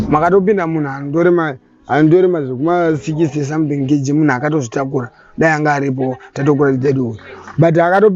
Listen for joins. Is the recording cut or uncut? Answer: uncut